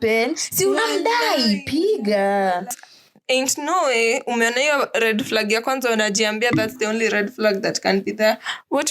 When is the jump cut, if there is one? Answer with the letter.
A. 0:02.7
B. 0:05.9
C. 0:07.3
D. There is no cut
A